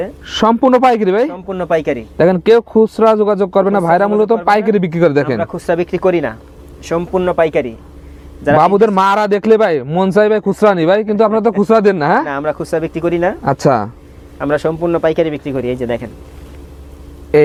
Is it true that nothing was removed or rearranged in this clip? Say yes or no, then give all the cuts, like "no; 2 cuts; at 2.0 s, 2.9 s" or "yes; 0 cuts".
yes; 0 cuts